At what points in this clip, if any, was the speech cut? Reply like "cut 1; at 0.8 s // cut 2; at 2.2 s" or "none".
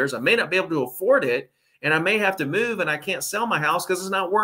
none